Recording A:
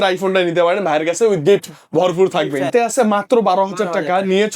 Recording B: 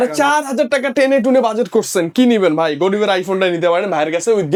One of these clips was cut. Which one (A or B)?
A